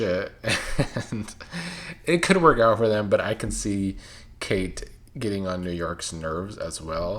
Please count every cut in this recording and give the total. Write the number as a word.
zero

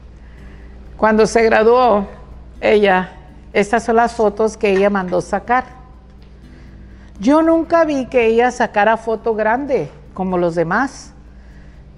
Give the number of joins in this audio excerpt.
zero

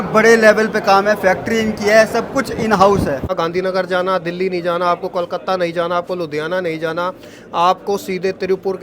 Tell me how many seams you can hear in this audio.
one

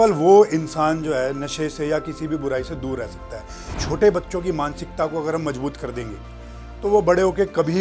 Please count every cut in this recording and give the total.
one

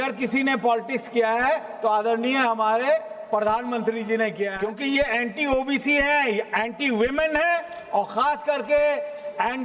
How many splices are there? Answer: one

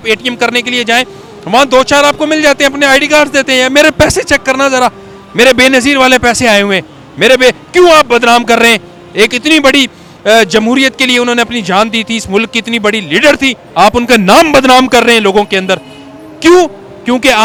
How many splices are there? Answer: zero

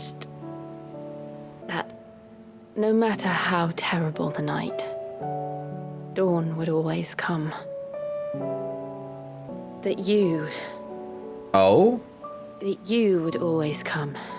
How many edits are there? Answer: three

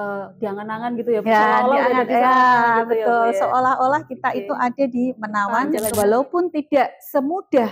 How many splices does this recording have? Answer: one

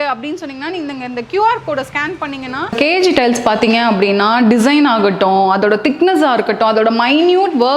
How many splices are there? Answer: one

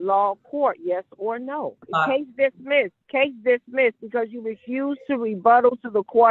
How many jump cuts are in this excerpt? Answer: two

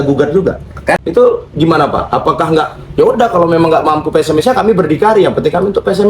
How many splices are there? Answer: one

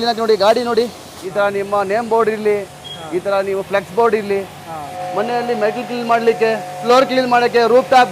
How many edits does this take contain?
three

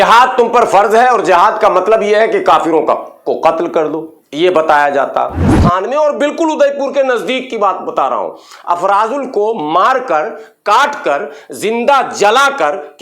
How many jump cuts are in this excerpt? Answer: one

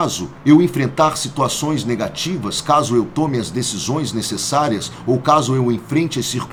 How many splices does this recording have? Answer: zero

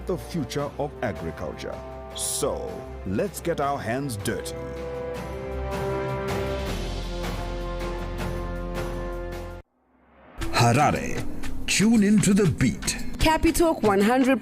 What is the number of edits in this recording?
one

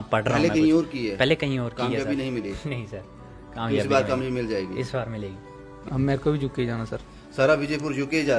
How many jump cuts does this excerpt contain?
one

